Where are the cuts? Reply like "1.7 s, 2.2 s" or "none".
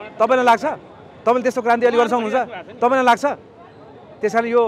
none